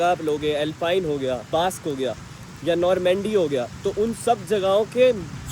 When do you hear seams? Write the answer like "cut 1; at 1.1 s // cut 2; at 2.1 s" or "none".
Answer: cut 1; at 1.4 s